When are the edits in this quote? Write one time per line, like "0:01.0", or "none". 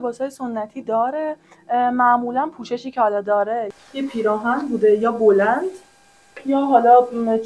0:03.7